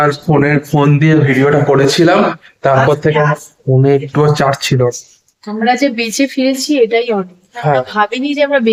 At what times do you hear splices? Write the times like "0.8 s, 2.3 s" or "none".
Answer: none

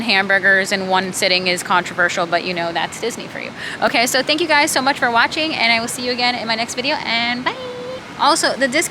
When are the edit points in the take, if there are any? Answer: none

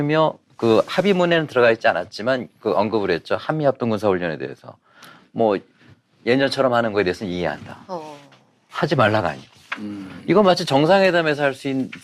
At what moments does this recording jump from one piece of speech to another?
none

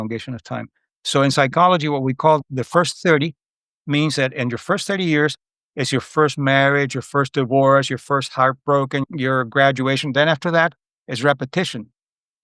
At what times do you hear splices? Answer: 2.4 s, 9.0 s

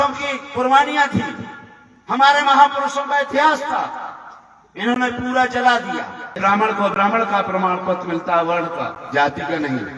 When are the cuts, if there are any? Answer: 6.4 s

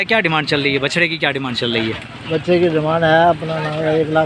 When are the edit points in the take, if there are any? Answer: none

